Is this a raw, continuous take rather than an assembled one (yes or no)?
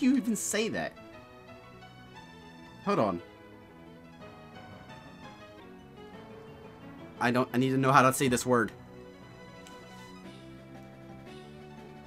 no